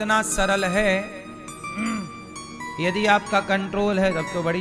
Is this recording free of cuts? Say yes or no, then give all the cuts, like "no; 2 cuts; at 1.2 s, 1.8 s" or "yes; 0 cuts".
yes; 0 cuts